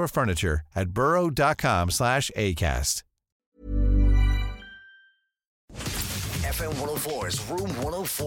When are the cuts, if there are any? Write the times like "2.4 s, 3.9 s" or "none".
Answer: 5.6 s